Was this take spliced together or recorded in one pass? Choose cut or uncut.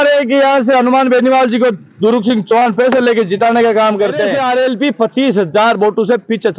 cut